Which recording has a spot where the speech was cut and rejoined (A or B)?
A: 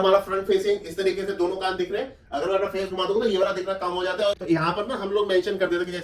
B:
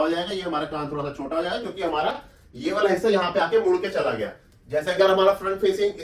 A